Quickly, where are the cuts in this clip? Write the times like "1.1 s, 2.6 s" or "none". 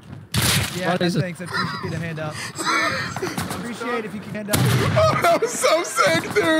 3.1 s, 4.6 s